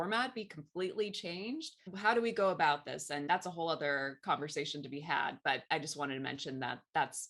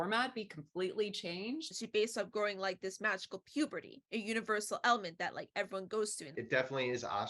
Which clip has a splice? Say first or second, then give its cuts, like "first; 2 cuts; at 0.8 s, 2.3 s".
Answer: second; 2 cuts; at 1.8 s, 6.3 s